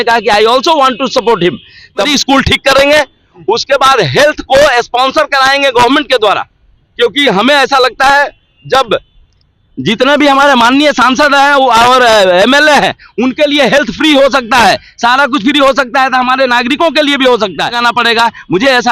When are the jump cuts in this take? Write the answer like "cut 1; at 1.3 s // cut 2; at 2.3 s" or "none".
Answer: cut 1; at 2.1 s // cut 2; at 17.8 s